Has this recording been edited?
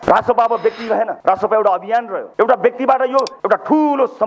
yes; 3 cuts; at 1.1 s, 2.2 s, 3.3 s

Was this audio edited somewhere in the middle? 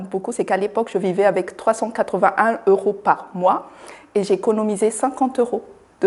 no; 0 cuts

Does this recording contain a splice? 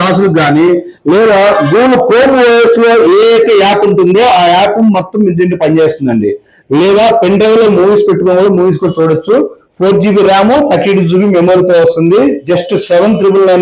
no; 0 cuts

